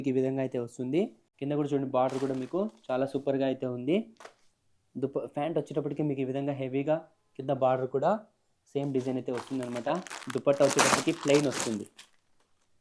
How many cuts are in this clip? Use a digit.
1